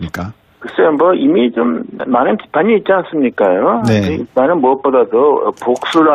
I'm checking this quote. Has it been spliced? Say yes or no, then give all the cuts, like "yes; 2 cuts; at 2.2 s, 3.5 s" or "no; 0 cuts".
no; 0 cuts